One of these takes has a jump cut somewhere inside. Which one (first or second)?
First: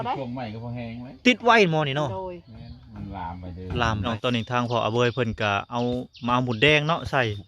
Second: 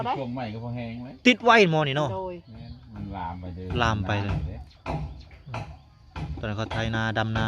first